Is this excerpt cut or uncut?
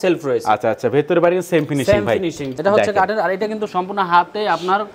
cut